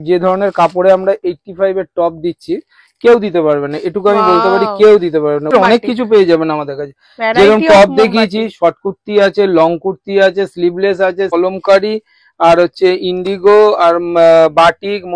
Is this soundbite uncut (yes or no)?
no